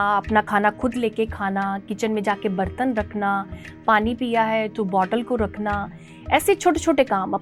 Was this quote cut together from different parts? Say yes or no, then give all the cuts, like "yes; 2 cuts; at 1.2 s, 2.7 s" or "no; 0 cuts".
no; 0 cuts